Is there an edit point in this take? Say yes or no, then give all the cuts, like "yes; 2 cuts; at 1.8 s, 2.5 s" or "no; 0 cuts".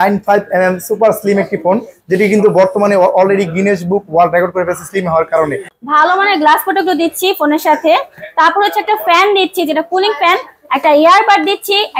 yes; 1 cut; at 5.7 s